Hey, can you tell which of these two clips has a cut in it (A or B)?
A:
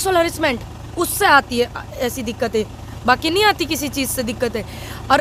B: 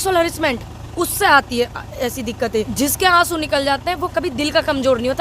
B